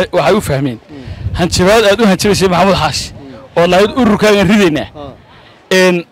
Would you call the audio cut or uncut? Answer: uncut